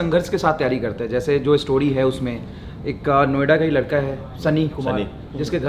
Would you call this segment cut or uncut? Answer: uncut